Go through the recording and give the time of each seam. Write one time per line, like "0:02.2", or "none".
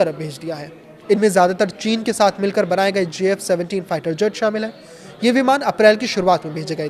none